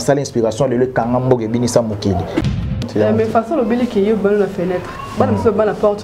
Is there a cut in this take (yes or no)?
yes